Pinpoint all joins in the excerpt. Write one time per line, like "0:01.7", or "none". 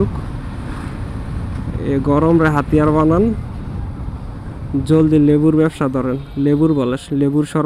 none